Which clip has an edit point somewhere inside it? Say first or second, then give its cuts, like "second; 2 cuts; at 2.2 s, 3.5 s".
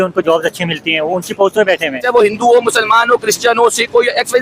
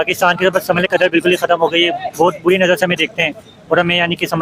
first; 1 cut; at 2.0 s